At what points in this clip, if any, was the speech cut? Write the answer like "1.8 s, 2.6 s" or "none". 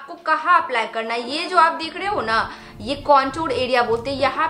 none